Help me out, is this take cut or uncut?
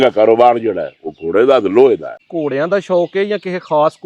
cut